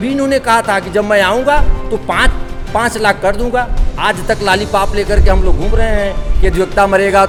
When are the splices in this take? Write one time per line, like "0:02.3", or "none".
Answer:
none